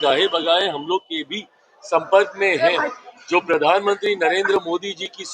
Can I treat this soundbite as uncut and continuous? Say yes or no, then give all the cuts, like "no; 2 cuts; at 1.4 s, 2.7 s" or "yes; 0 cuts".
yes; 0 cuts